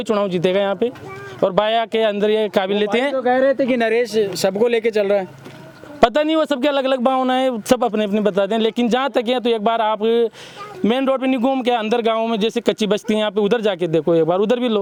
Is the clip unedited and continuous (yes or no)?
yes